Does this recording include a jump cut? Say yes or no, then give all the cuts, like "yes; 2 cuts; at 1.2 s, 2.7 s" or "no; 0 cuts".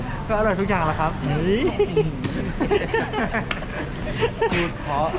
no; 0 cuts